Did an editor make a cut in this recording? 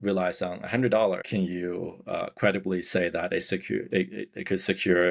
yes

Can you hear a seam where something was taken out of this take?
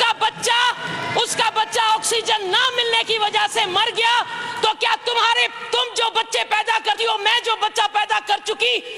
no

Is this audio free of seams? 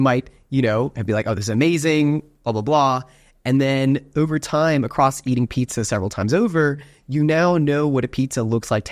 yes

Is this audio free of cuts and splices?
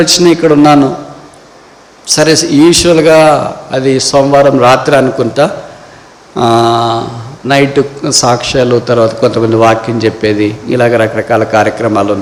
yes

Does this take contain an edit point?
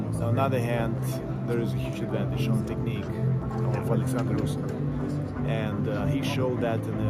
no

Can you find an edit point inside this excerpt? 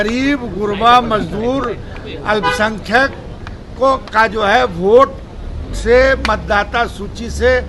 no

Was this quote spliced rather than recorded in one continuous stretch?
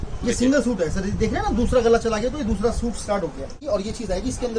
yes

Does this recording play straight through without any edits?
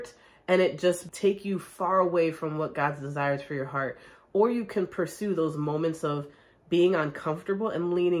no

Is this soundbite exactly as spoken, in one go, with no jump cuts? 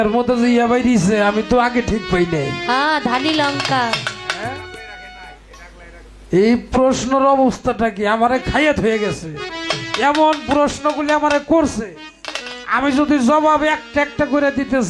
yes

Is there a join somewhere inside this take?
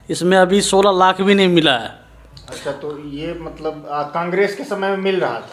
no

